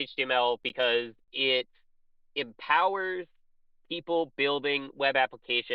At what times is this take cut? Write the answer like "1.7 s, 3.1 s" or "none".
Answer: none